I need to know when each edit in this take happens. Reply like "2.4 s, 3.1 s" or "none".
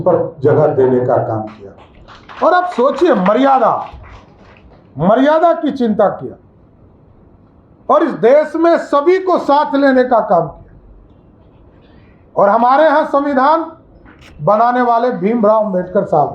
none